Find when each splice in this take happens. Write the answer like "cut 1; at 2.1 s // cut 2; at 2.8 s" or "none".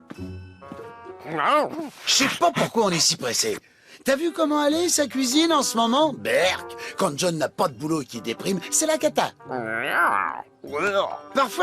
cut 1; at 2.1 s